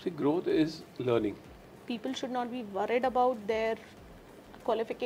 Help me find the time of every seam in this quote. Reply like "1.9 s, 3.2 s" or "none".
1.8 s